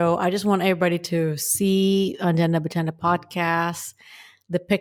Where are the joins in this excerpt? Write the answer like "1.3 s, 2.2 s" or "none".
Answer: none